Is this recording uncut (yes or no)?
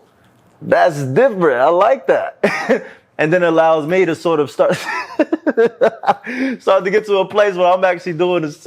yes